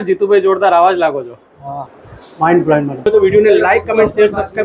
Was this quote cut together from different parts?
yes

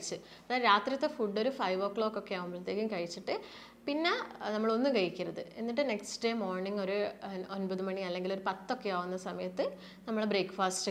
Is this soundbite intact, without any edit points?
yes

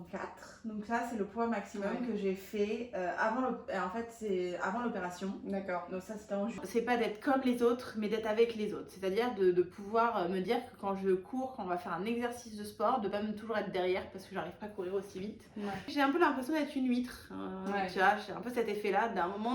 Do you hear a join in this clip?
yes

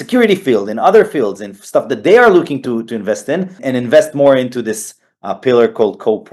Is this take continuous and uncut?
no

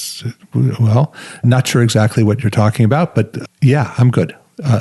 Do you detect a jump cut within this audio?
yes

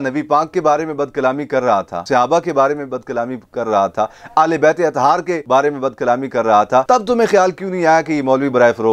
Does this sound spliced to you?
yes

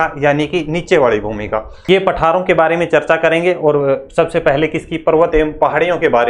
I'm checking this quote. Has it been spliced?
yes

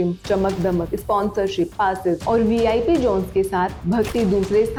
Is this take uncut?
yes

